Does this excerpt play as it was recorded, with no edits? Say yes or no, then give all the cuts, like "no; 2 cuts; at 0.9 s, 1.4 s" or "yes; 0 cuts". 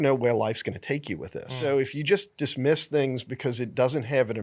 no; 1 cut; at 1.6 s